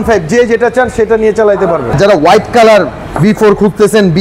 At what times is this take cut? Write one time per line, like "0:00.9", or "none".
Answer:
0:01.9

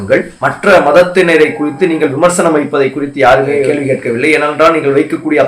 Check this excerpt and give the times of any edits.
0:03.7

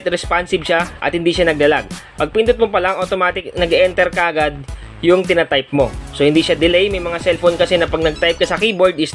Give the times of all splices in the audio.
0:01.0

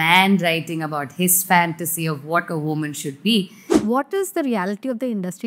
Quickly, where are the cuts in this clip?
0:03.7

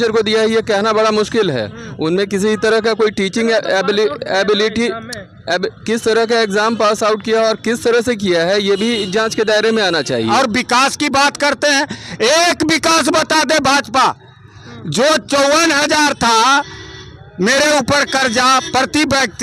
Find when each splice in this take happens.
0:10.3

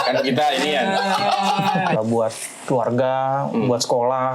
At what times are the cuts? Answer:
0:02.0

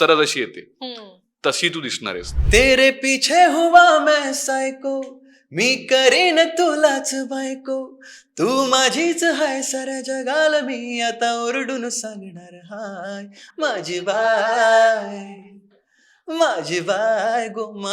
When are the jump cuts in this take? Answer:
0:02.3

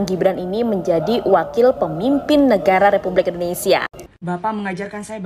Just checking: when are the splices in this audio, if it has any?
0:04.0

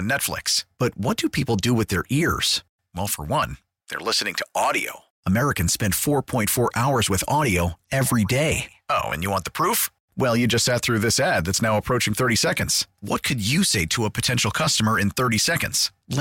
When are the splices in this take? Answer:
none

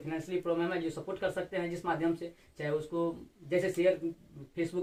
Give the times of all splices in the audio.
none

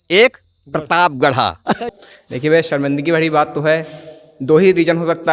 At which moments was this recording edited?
0:01.6

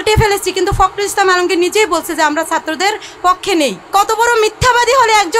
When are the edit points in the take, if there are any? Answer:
0:03.8

